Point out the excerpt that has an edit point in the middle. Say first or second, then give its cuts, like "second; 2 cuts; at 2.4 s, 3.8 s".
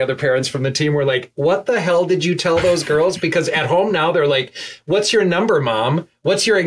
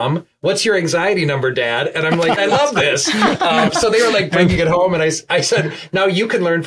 second; 1 cut; at 2.4 s